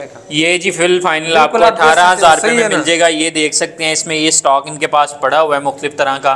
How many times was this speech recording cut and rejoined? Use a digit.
0